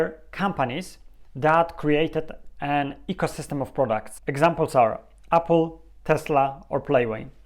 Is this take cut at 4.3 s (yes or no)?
no